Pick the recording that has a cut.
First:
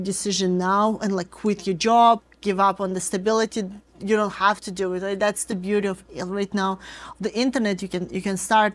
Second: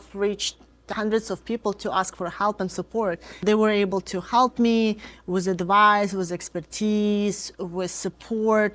second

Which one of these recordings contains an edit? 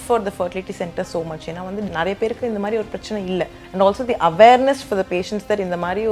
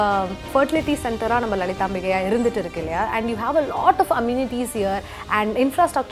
first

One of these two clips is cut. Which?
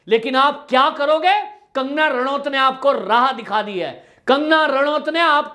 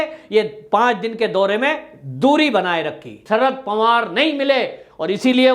second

